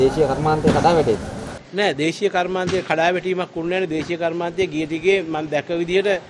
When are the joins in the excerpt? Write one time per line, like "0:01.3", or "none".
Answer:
none